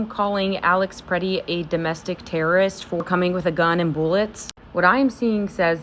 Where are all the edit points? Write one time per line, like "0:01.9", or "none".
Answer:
none